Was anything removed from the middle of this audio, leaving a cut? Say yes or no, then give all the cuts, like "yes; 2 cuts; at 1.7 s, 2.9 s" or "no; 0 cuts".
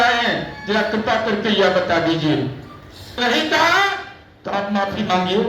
yes; 1 cut; at 3.2 s